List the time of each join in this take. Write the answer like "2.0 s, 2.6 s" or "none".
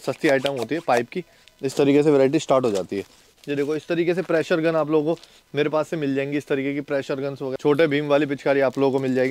3.3 s, 7.5 s